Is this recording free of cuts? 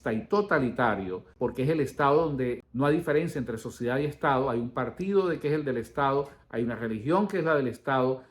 no; 2 cuts; at 1.3 s, 2.6 s

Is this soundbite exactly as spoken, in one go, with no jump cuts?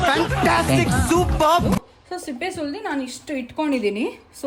yes; 0 cuts

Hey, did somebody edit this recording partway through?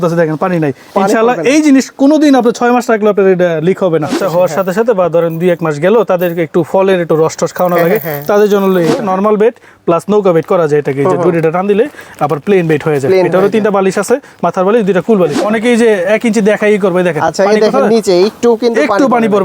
yes; 3 cuts; at 4.2 s, 9.0 s, 15.4 s

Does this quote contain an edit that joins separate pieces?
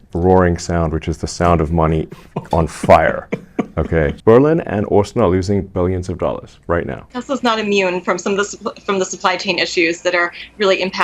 yes; 2 cuts; at 4.2 s, 7.1 s

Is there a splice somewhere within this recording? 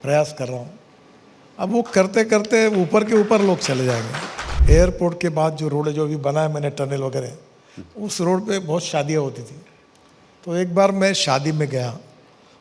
yes; 1 cut; at 4.5 s

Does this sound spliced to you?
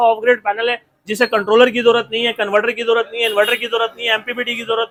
no; 0 cuts

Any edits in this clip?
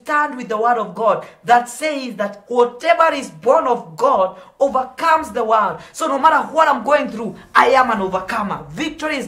no; 0 cuts

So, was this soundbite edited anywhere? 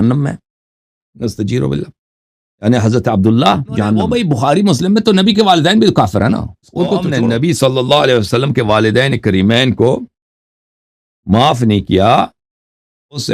yes; 2 cuts; at 4.1 s, 7.1 s

